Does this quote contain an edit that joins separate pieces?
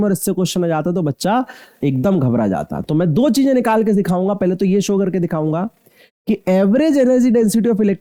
no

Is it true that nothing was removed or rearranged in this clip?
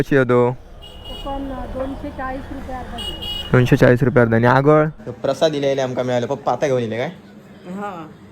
no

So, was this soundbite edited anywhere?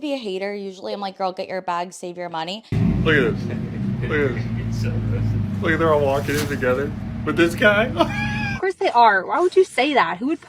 yes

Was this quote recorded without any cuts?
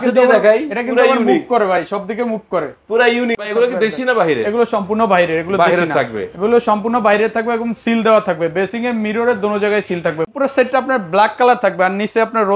no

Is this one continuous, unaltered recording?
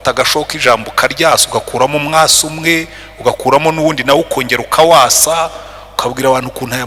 yes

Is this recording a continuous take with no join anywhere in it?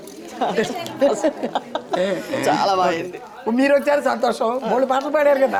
yes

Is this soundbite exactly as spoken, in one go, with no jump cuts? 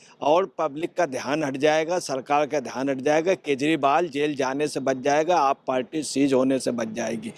yes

